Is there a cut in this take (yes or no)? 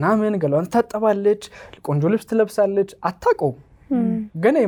no